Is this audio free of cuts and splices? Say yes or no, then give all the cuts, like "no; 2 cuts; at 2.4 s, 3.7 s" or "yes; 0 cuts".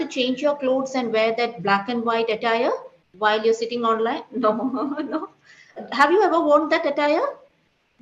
no; 1 cut; at 5.8 s